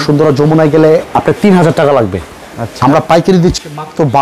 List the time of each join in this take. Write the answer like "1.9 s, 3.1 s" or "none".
1.1 s